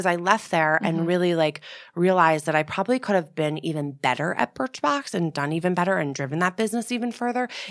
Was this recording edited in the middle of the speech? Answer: no; 0 cuts

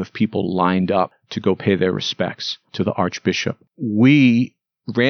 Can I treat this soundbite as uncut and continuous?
no; 2 cuts; at 1.2 s, 3.7 s

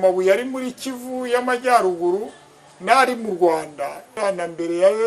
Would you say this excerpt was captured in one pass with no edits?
no; 1 cut; at 4.2 s

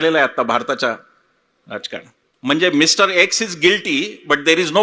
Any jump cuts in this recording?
yes; 1 cut; at 2.2 s

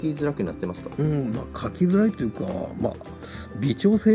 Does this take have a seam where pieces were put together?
no; 0 cuts

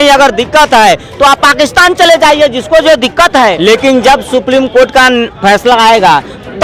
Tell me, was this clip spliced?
yes; 1 cut; at 3.6 s

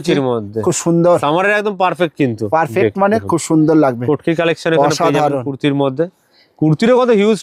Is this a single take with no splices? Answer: yes; 0 cuts

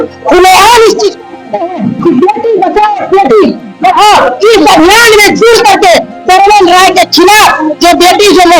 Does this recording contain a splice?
no; 0 cuts

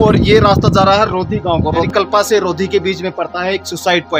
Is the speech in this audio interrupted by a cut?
yes; 1 cut; at 1.9 s

